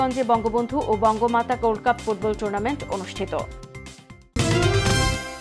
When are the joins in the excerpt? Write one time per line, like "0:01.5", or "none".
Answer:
0:04.3